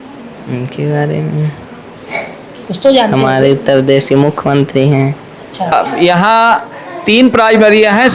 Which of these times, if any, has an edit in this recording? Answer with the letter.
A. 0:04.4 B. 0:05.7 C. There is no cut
B